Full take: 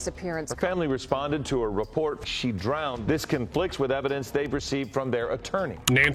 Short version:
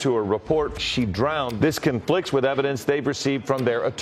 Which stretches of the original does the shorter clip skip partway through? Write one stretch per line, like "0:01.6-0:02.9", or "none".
none